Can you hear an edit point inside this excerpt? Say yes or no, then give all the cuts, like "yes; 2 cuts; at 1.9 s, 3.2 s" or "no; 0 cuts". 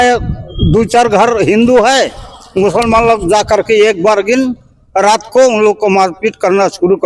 no; 0 cuts